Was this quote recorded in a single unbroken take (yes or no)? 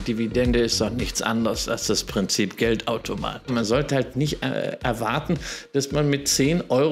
no